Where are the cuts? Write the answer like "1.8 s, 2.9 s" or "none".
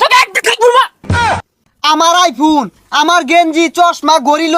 1.3 s